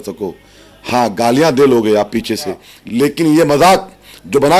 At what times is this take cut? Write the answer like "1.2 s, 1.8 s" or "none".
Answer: 2.8 s